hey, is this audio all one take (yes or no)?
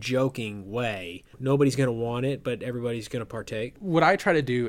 no